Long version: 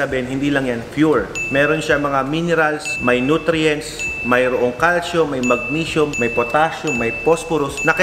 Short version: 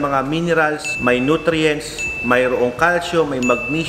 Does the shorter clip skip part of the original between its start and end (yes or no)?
no